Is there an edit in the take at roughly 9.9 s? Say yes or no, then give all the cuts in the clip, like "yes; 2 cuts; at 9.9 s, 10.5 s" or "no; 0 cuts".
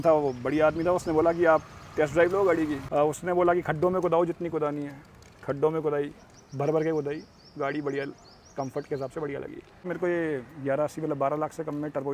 yes; 2 cuts; at 2.8 s, 9.9 s